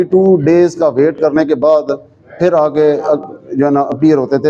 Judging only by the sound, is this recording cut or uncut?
uncut